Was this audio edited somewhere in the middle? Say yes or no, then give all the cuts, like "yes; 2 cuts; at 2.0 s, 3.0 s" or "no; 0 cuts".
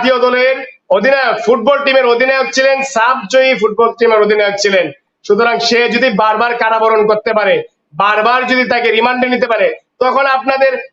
no; 0 cuts